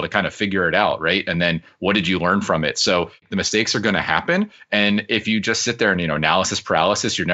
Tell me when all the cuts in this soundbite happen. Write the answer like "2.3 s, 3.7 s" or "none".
3.3 s